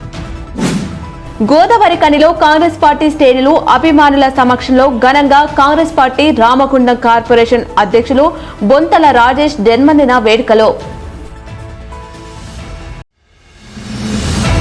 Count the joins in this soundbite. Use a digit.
1